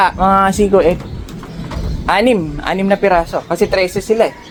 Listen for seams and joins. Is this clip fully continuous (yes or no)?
yes